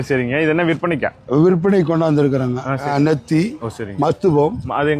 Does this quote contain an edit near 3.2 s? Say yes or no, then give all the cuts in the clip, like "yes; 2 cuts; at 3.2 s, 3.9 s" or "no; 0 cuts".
yes; 1 cut; at 3.2 s